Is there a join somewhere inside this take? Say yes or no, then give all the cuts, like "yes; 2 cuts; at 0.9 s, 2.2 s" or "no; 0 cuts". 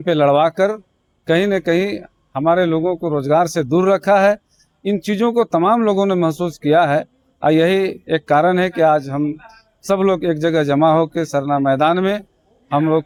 no; 0 cuts